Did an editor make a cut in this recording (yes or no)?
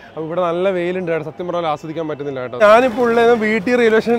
yes